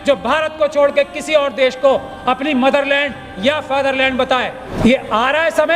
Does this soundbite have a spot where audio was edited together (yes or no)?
yes